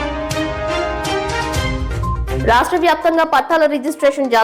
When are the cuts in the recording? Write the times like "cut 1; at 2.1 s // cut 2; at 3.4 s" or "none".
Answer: cut 1; at 2.4 s